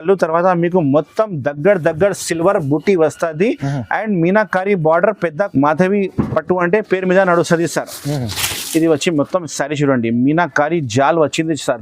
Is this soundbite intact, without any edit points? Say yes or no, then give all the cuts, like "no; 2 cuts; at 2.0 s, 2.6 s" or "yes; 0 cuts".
no; 1 cut; at 5.5 s